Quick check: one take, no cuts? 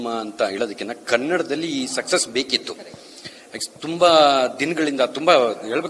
yes; 0 cuts

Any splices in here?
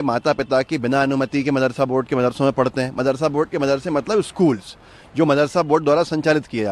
no; 0 cuts

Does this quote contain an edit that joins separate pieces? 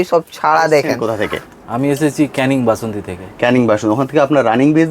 yes; 1 cut; at 1.0 s

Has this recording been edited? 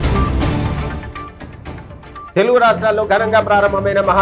yes; 2 cuts; at 1.0 s, 2.2 s

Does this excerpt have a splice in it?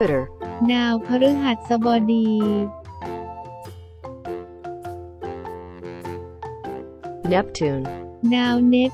no; 0 cuts

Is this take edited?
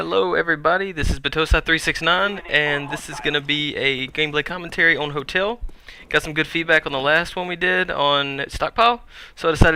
no; 0 cuts

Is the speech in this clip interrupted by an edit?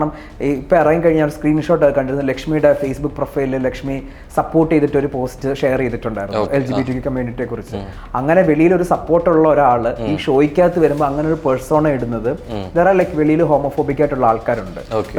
no; 0 cuts

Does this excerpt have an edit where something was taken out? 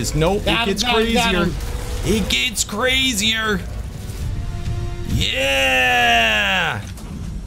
yes; 1 cut; at 4.2 s

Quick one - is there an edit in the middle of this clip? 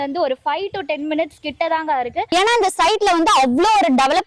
yes; 1 cut; at 2.2 s

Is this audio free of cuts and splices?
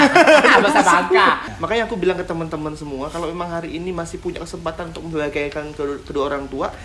no; 1 cut; at 1.5 s

